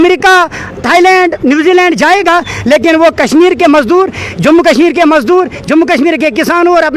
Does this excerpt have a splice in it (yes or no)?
no